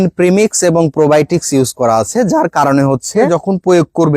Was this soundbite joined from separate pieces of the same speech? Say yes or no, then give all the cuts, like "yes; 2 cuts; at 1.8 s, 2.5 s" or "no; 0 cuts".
yes; 1 cut; at 3.3 s